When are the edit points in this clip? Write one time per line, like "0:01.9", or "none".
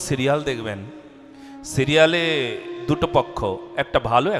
none